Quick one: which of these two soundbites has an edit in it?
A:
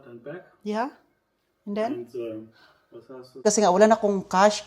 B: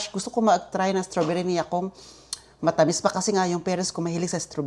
A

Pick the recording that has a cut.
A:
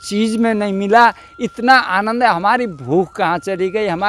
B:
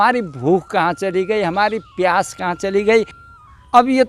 B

